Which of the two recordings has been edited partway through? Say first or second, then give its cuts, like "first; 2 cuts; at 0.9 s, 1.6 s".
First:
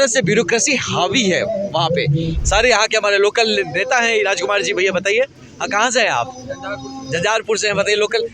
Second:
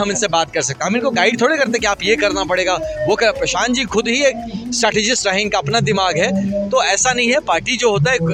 first; 1 cut; at 2.4 s